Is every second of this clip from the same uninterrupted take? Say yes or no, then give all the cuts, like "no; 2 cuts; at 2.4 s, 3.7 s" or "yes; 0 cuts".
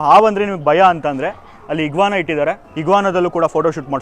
no; 1 cut; at 2.7 s